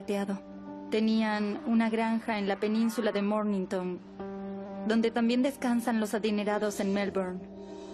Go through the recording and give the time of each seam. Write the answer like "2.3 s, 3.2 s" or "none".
4.9 s